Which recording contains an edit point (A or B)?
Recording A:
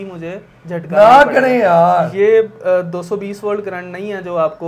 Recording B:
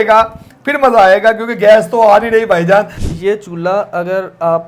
B